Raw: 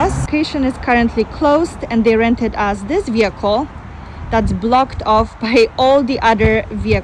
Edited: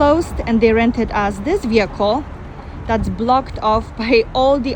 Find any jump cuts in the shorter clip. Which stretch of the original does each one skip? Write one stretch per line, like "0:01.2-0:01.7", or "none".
none